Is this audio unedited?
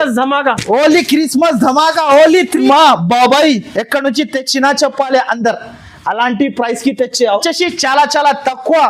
no; 2 cuts; at 2.6 s, 7.4 s

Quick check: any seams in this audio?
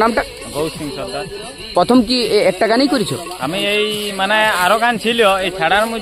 no; 0 cuts

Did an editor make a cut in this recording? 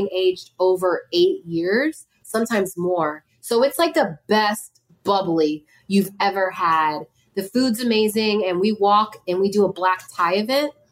no; 0 cuts

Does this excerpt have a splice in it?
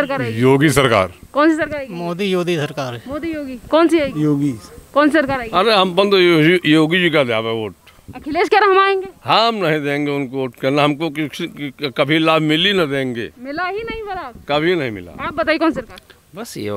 no; 0 cuts

